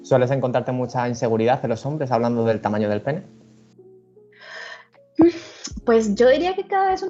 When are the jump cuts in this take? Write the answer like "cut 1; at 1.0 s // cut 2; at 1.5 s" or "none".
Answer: none